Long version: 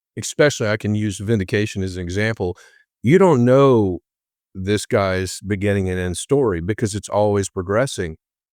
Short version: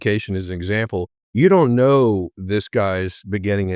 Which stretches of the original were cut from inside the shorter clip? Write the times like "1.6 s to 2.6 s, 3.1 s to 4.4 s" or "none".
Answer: 2.7 s to 2.9 s, 4.0 s to 4.5 s

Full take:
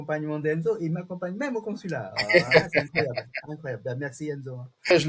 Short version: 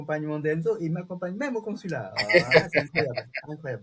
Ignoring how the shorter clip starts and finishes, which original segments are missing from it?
none

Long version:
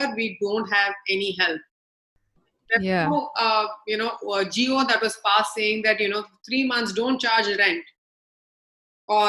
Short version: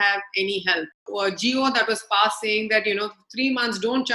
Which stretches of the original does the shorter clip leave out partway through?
1.8 s to 4.2 s

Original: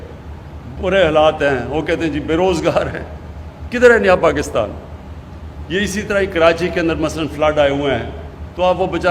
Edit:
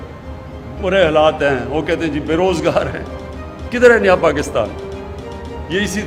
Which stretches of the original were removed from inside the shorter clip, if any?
none

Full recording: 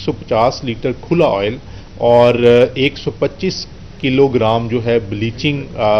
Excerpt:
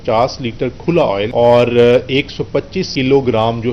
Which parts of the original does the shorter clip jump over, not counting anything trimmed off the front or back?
1.5 s to 2.0 s, 3.5 s to 3.9 s

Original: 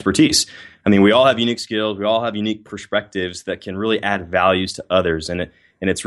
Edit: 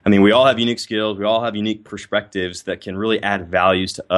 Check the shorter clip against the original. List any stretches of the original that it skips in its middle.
none

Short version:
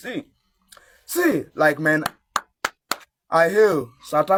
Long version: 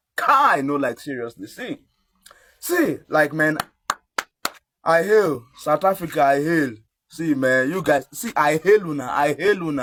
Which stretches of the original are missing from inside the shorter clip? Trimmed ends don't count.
none

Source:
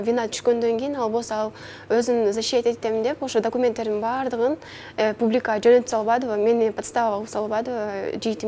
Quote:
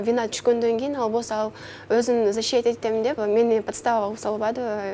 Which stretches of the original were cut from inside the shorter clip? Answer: 3.2 s to 6.3 s

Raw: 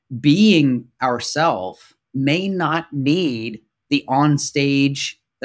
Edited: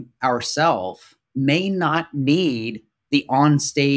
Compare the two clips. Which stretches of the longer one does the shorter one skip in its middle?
none

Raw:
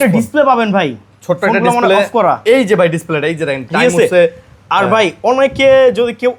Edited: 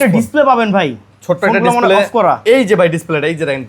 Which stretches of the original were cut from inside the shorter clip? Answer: none

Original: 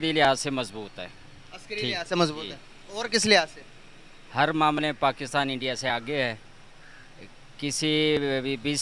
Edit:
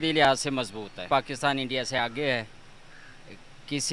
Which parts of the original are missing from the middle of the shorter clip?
1.1 s to 5.0 s

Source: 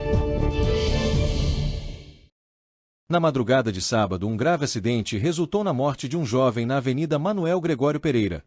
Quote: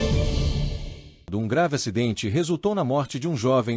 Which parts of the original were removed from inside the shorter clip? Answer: 2.3 s to 4.2 s

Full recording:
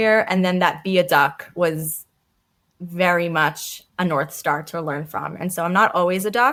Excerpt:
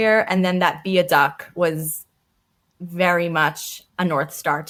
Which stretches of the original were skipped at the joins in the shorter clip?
none

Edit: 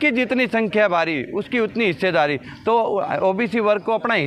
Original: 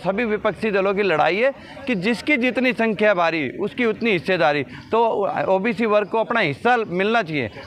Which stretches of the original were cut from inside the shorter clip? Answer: none

